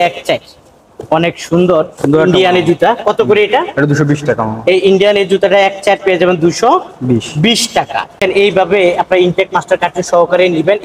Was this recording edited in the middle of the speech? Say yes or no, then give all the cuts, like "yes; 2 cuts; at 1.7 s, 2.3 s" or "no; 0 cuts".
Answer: yes; 1 cut; at 8.2 s